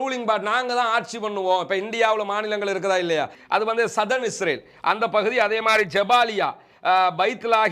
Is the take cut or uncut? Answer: cut